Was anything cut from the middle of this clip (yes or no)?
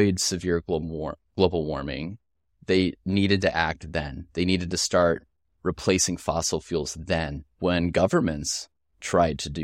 yes